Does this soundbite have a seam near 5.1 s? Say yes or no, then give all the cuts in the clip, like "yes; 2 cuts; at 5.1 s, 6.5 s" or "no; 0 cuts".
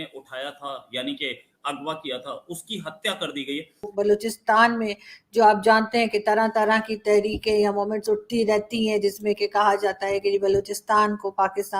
no; 1 cut; at 3.9 s